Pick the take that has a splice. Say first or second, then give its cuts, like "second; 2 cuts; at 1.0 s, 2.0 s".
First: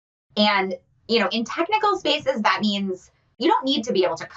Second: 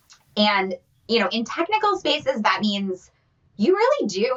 first; 1 cut; at 3.3 s